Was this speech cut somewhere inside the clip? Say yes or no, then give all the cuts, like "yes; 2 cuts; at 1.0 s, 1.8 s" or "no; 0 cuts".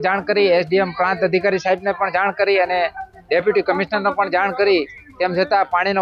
no; 0 cuts